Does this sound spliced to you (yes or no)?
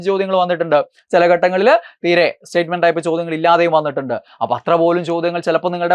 no